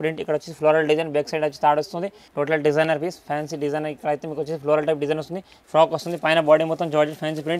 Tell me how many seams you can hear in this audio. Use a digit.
2